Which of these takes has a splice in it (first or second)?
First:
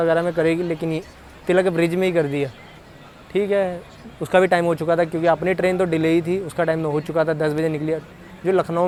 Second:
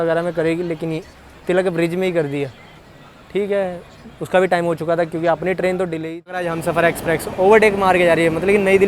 second